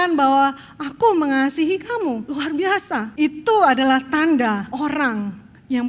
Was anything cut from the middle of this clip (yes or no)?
yes